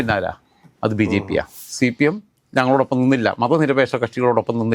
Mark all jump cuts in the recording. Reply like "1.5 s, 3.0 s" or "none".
1.6 s